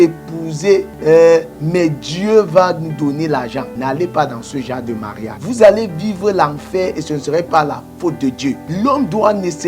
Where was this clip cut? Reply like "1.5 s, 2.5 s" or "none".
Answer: 0.9 s, 3.7 s, 5.3 s, 8.6 s